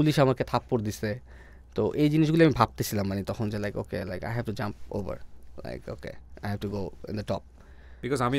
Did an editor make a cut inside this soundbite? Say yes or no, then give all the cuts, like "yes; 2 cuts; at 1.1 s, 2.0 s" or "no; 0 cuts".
no; 0 cuts